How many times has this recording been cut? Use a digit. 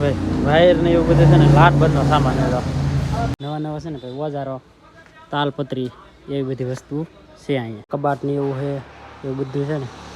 2